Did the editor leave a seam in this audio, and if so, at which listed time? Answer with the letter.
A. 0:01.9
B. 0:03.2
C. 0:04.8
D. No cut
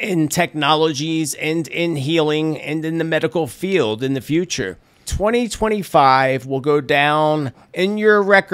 C